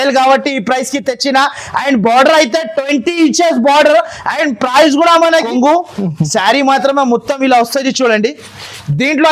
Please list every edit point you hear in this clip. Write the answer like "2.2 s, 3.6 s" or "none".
5.5 s

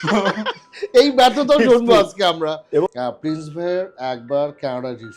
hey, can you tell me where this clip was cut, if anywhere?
2.9 s

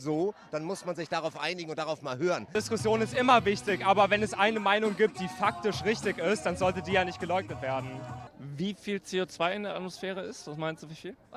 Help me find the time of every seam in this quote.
2.5 s, 8.3 s

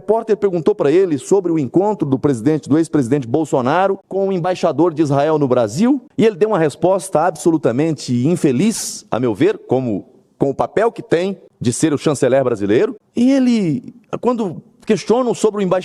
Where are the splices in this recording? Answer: 4.2 s, 6.1 s, 11.5 s, 13.0 s

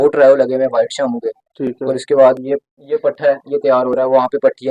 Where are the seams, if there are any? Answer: none

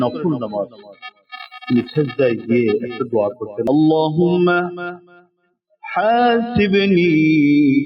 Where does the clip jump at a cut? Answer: 3.6 s

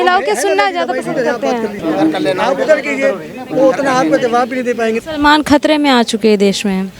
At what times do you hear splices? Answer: 1.8 s, 5.0 s

